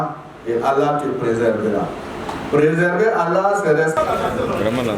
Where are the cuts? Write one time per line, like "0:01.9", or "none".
0:04.0